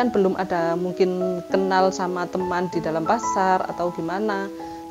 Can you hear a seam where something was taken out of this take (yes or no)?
no